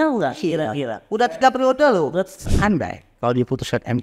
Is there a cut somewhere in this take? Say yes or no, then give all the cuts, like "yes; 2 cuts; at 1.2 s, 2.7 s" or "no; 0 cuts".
yes; 1 cut; at 2.5 s